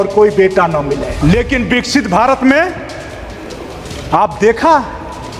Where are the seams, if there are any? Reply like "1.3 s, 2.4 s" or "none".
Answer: 1.1 s